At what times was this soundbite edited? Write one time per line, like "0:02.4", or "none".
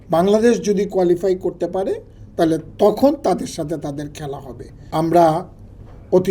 0:04.8